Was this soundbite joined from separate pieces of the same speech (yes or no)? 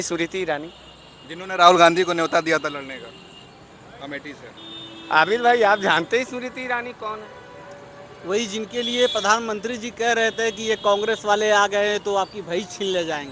no